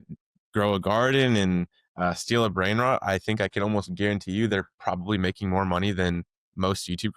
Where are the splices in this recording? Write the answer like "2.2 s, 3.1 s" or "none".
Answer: none